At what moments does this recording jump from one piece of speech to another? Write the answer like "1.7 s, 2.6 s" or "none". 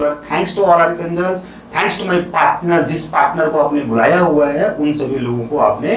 none